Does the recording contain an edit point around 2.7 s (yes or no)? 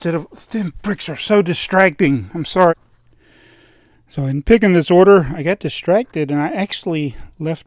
yes